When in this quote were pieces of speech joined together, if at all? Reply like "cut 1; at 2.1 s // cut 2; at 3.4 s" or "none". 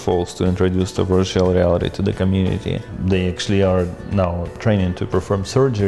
cut 1; at 2.9 s // cut 2; at 4.6 s